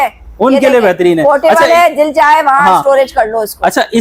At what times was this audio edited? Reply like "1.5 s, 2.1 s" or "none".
none